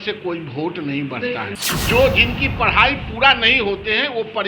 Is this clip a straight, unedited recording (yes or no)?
no